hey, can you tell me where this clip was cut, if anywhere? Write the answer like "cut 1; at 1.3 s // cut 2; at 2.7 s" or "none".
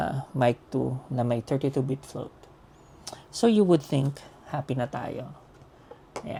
none